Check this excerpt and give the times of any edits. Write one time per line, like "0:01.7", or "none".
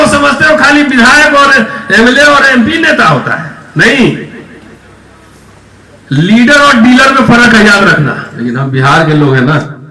0:08.3